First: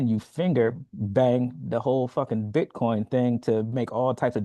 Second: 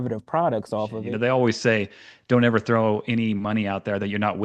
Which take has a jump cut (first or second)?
second